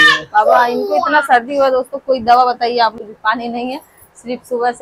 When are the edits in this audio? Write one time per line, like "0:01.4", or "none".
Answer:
0:03.0